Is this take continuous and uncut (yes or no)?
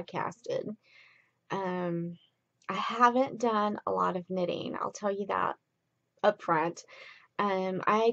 no